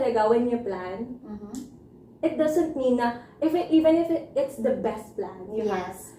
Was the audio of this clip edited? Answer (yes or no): no